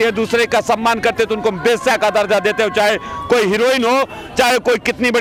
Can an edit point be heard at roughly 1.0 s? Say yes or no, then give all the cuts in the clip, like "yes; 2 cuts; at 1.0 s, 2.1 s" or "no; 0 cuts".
no; 0 cuts